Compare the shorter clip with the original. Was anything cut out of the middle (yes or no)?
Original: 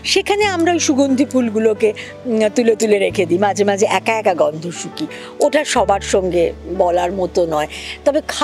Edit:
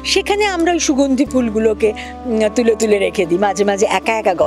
no